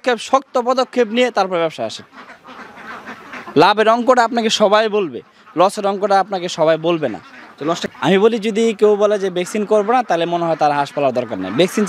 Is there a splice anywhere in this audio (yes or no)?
yes